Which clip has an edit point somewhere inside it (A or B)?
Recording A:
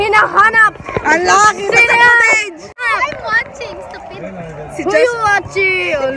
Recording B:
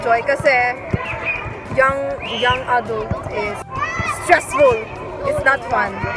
A